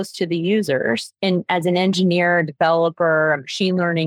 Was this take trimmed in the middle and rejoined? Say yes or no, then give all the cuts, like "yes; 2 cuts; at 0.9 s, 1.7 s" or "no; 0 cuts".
no; 0 cuts